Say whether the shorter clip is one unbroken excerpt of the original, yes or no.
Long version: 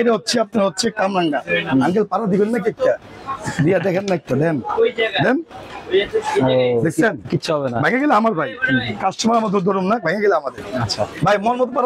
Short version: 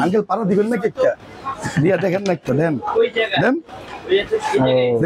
yes